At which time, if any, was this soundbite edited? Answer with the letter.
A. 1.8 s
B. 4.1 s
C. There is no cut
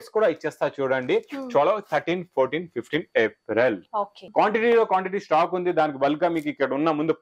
B